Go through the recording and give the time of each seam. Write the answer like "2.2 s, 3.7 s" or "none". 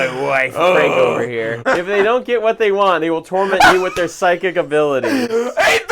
1.6 s